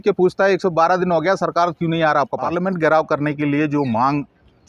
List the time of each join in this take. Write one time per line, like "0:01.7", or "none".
0:02.5